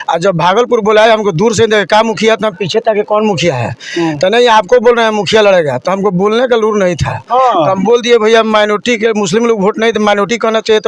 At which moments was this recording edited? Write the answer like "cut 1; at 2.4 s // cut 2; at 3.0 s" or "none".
none